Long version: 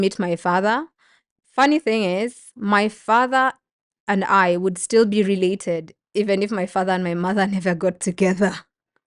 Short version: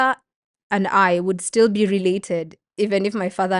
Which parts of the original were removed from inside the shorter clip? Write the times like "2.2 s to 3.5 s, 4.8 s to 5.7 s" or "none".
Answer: none